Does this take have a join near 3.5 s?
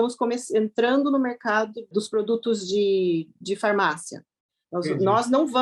no; 1 cut; at 1.9 s

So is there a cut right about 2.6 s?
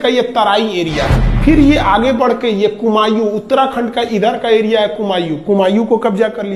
no; 1 cut; at 1.2 s

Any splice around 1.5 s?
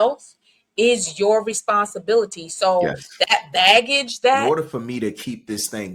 no; 1 cut; at 4.4 s

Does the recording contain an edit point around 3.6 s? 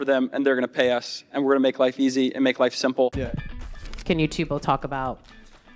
yes; 1 cut; at 3.6 s

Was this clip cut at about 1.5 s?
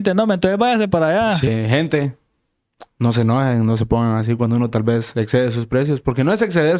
yes; 1 cut; at 1.5 s

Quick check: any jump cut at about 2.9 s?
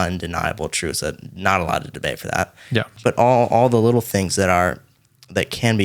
yes; 1 cut; at 2.9 s

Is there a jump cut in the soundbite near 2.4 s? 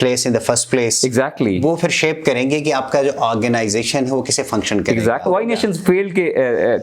no; 1 cut; at 5.2 s

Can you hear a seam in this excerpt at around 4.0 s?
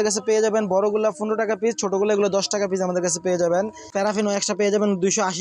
yes; 1 cut; at 4.0 s

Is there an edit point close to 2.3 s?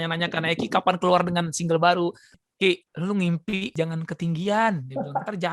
yes; 1 cut; at 2.3 s

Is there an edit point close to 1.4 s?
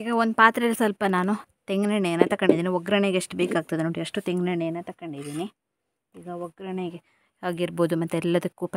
no; 0 cuts

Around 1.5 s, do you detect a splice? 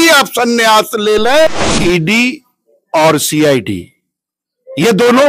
yes; 1 cut; at 1.5 s

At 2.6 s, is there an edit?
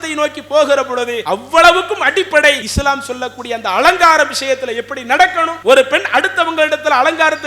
yes; 3 cuts; at 1.2 s, 2.6 s, 5.5 s

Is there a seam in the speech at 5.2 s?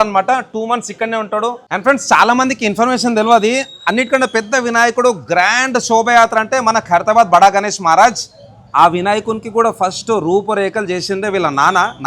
no; 1 cut; at 1.6 s

